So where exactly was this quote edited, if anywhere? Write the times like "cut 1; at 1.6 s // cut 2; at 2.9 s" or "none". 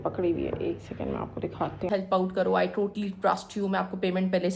cut 1; at 1.9 s